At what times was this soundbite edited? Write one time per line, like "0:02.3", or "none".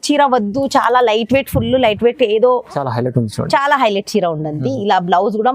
0:02.8